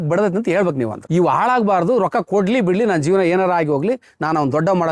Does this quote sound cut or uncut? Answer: cut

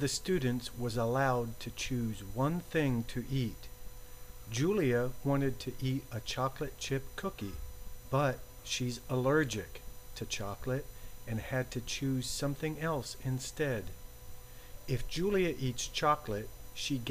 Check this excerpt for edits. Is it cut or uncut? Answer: uncut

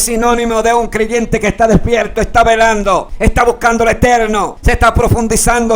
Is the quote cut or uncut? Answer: cut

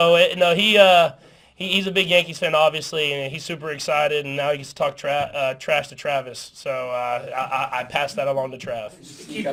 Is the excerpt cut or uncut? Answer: uncut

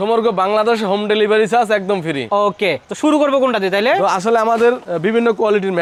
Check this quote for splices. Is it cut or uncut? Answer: uncut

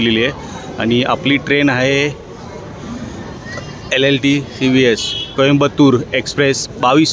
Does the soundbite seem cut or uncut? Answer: uncut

